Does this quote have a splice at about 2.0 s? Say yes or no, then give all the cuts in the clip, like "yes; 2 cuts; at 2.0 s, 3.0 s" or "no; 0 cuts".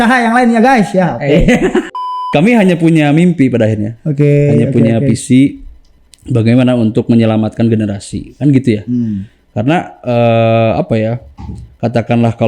yes; 1 cut; at 2.0 s